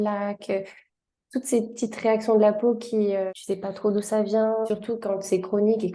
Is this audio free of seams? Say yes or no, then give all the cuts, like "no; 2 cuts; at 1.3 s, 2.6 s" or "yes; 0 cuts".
no; 2 cuts; at 3.3 s, 4.7 s